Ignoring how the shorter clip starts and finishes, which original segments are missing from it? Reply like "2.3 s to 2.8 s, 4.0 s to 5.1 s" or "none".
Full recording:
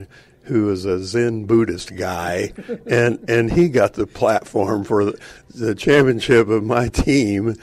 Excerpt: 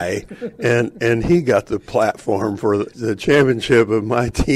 5.2 s to 5.5 s